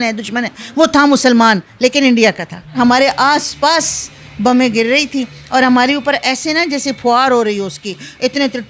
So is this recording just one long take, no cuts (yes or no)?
no